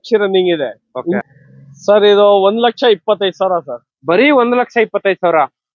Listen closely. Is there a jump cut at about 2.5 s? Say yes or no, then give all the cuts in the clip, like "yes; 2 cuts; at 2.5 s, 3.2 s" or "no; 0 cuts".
no; 1 cut; at 1.2 s